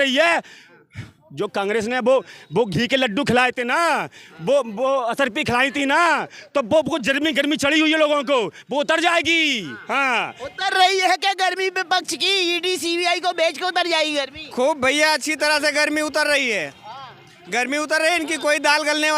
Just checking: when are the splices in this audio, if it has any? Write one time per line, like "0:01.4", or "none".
none